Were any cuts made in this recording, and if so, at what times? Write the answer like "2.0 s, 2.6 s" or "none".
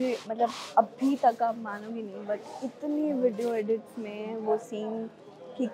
none